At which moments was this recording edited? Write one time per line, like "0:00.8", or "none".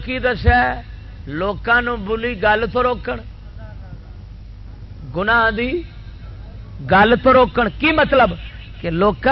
none